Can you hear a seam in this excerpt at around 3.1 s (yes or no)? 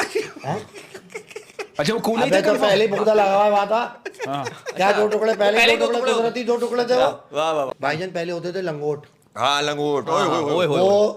no